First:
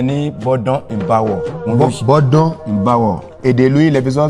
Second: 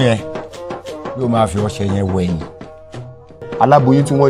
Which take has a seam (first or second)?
first